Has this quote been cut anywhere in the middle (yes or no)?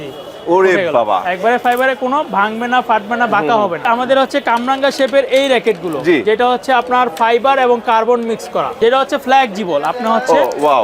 yes